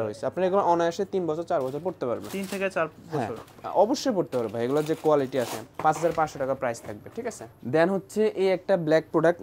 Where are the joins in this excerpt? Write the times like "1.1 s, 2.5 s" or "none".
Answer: none